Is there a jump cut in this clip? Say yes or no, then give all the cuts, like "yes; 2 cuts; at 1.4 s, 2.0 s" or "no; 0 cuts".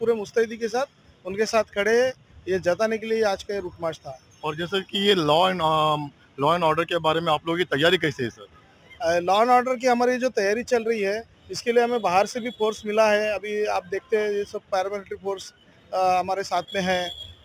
no; 0 cuts